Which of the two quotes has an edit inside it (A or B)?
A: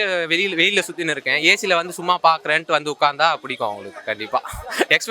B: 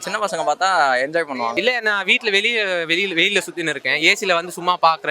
B